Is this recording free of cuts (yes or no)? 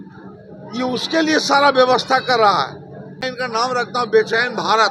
no